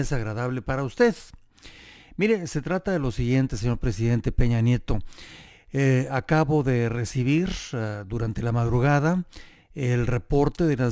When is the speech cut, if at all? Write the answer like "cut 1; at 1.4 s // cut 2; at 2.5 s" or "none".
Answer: cut 1; at 4.3 s